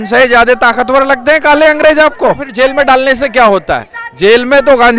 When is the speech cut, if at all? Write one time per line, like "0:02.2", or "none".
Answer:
0:02.5